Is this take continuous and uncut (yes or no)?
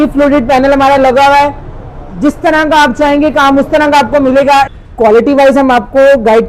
no